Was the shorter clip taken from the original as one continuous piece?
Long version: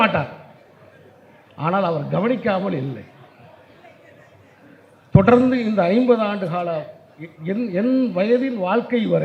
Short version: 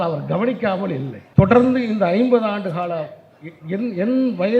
no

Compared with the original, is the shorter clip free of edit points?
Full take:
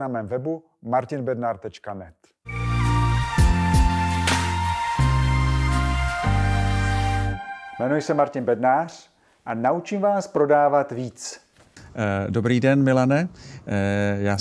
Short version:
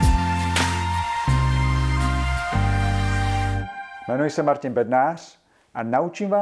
yes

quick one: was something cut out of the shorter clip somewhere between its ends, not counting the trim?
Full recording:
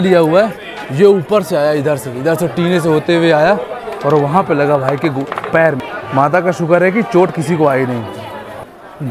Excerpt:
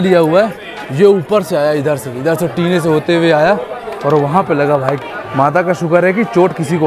yes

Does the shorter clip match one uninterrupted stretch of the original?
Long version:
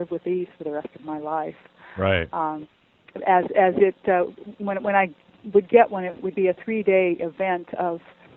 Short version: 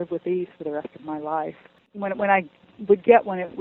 no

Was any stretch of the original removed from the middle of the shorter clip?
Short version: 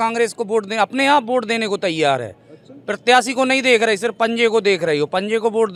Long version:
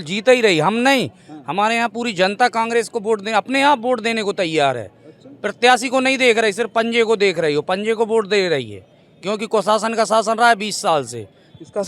no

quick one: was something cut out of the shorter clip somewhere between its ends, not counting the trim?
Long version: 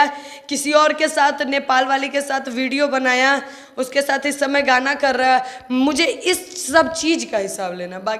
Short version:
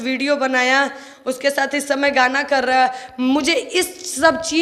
no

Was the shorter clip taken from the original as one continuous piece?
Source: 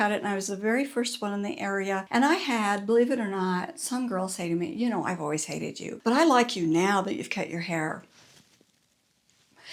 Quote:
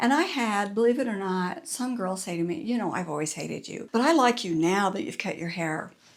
yes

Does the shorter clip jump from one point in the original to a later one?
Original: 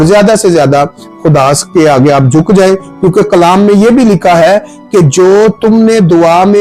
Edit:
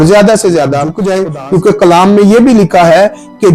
yes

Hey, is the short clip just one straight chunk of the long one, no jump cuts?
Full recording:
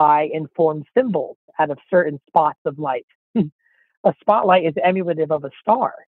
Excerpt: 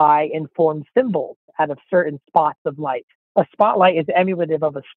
no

